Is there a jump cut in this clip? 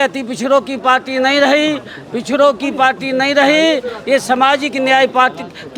no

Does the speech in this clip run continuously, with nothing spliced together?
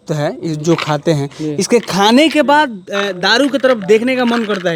yes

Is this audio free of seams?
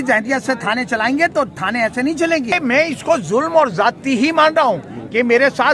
no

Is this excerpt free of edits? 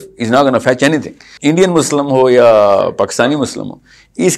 no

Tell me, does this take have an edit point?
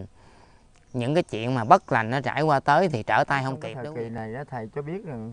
yes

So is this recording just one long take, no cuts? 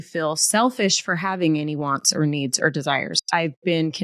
yes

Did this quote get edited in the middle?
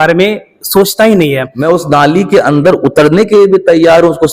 yes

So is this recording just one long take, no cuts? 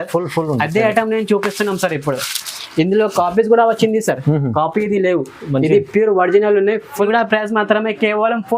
no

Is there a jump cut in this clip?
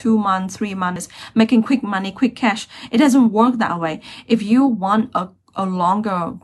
yes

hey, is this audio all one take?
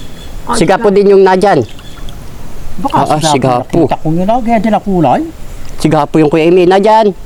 yes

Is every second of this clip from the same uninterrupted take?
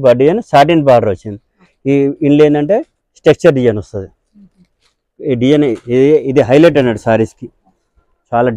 yes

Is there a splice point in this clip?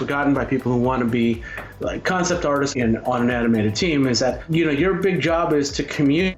yes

